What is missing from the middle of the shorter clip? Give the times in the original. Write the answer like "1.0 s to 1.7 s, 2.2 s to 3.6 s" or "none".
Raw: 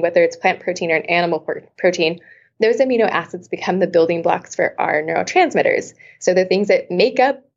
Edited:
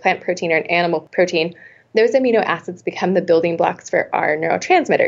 1.5 s to 1.7 s